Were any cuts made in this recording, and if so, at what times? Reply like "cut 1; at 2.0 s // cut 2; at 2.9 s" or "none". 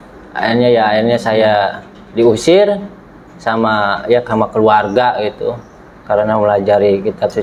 none